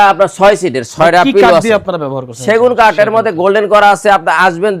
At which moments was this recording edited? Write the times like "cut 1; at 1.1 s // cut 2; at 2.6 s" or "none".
none